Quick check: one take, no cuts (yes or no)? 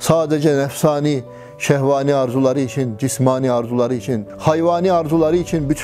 yes